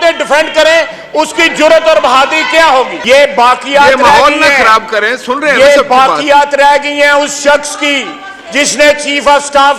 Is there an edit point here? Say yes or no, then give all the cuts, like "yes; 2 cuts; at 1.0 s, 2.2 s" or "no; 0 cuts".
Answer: yes; 1 cut; at 3.0 s